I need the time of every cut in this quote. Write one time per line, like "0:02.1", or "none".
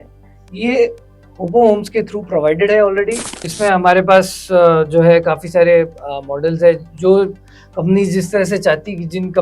0:03.4